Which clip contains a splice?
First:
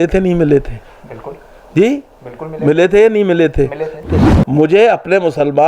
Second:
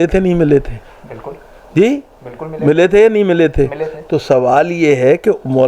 first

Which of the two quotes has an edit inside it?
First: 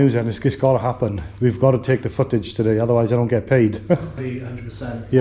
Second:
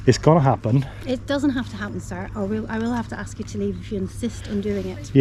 first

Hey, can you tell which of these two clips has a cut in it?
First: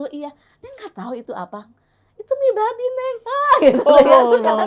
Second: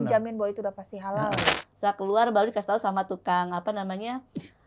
second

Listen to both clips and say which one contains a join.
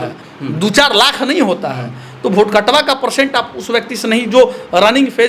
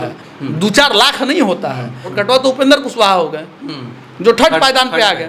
second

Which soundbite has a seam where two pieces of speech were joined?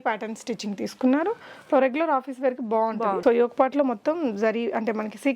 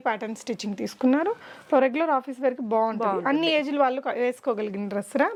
first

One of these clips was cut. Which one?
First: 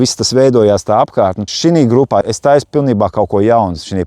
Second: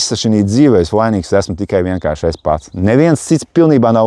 first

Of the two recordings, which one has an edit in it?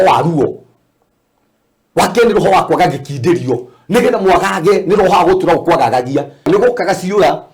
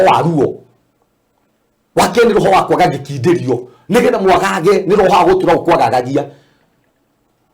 first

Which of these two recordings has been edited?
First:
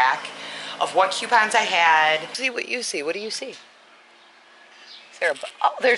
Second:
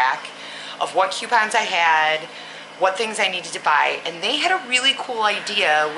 first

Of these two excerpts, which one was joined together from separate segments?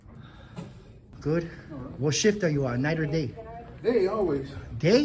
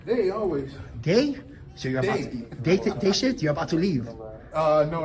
first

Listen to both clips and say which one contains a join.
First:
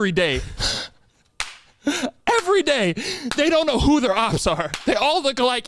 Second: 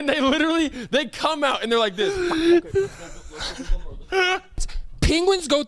second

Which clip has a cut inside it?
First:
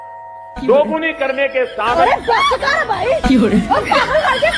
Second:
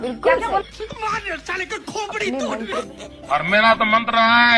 second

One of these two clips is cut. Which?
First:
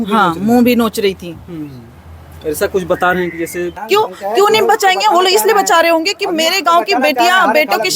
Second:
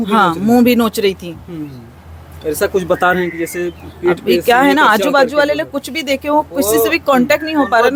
first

